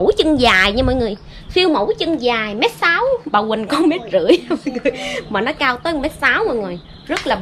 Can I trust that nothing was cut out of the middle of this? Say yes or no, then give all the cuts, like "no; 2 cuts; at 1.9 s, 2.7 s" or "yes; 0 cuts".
yes; 0 cuts